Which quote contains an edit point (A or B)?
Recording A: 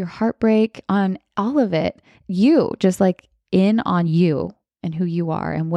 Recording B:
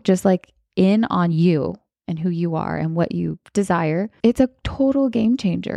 B